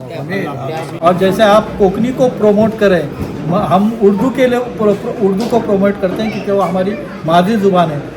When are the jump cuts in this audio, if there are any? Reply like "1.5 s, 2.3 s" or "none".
0.9 s